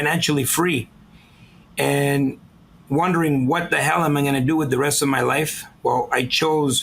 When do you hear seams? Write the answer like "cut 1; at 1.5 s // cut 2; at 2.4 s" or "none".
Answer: none